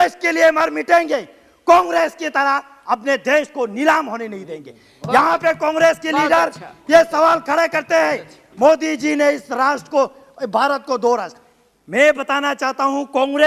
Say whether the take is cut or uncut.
uncut